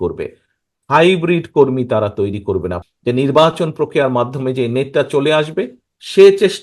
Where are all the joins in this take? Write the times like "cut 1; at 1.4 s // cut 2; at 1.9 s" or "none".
cut 1; at 2.8 s